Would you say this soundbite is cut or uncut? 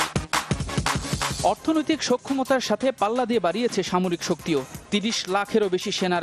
uncut